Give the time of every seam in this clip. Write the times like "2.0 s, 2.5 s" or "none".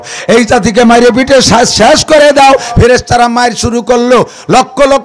2.7 s